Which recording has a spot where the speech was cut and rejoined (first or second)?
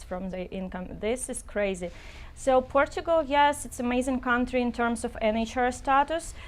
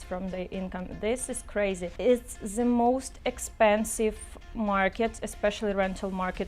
second